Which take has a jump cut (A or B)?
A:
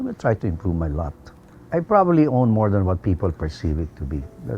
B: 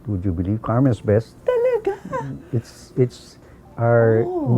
A